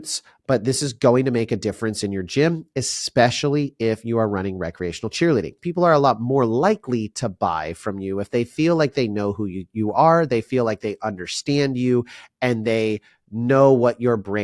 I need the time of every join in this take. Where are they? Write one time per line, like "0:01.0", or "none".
0:05.6